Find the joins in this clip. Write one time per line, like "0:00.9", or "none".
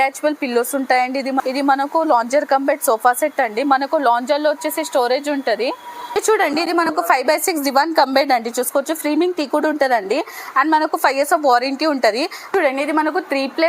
0:01.5
0:05.8
0:12.5